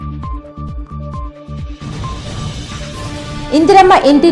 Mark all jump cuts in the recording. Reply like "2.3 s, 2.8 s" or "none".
1.4 s, 3.1 s